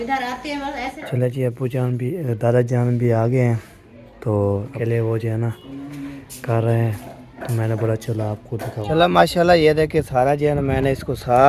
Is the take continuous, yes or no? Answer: no